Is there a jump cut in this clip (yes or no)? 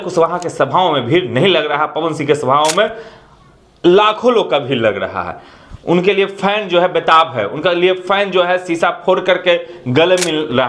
no